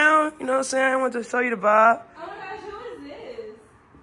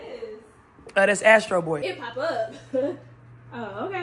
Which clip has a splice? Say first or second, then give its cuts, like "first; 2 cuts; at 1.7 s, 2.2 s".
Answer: second; 1 cut; at 1.8 s